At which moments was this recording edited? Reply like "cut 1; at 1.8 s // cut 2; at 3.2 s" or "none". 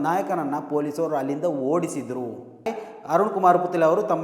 cut 1; at 2.8 s